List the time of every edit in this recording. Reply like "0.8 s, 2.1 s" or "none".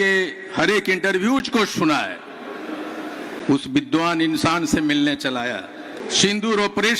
6.0 s